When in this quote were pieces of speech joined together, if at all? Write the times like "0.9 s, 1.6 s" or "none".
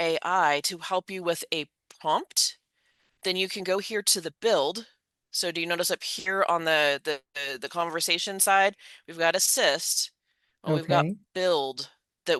none